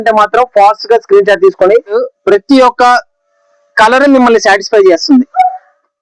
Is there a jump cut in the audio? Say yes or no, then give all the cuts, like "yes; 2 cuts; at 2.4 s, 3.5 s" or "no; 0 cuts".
yes; 1 cut; at 2.0 s